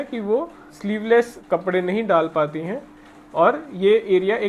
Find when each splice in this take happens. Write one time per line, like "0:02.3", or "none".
none